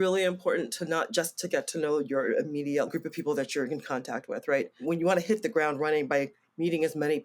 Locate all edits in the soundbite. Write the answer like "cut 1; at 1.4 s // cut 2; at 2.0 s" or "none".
cut 1; at 2.9 s // cut 2; at 4.8 s